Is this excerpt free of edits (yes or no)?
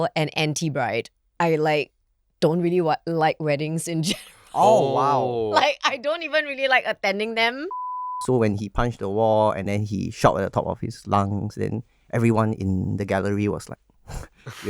no